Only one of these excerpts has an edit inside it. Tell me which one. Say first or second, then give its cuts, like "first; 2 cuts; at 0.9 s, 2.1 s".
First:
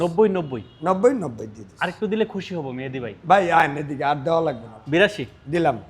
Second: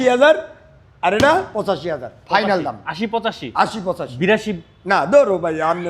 first; 1 cut; at 4.8 s